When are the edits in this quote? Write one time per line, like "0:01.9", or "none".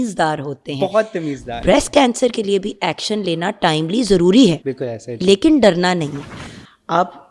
0:01.6
0:06.3